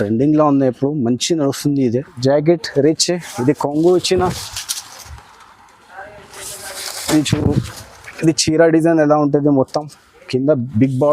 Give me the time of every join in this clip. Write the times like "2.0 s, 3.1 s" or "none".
2.2 s